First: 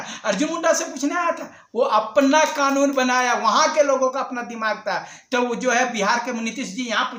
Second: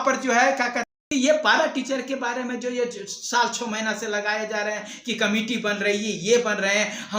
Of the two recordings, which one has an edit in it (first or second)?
second